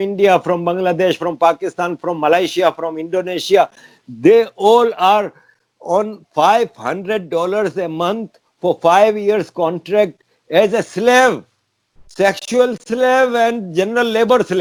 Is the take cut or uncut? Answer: uncut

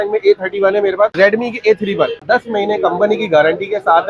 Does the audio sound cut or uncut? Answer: cut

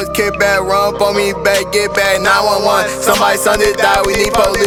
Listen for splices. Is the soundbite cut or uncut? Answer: uncut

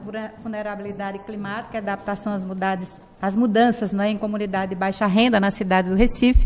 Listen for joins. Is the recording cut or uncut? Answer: uncut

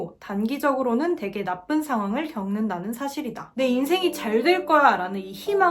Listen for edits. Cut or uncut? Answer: cut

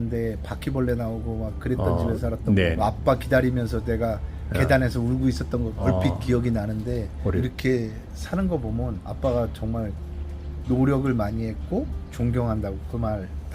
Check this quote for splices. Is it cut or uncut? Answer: cut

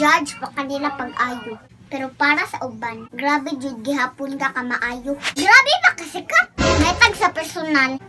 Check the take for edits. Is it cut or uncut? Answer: cut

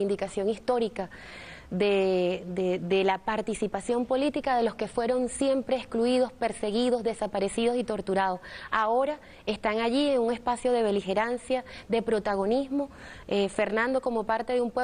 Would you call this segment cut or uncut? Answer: cut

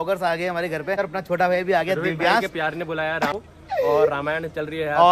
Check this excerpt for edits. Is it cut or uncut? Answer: cut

